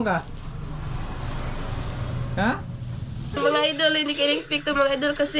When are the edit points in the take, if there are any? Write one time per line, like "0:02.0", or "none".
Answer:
0:03.4